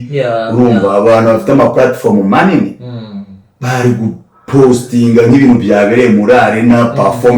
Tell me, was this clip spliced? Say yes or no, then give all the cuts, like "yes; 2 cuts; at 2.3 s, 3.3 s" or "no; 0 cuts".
no; 0 cuts